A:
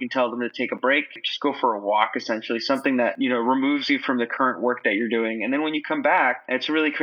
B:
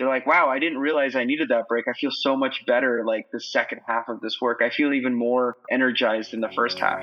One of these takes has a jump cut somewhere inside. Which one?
A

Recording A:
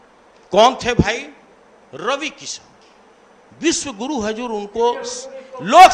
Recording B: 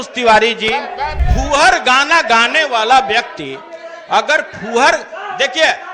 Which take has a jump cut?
B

